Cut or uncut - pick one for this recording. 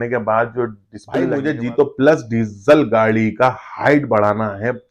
cut